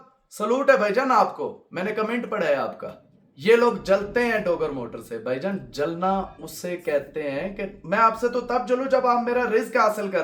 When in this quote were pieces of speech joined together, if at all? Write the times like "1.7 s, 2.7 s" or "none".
none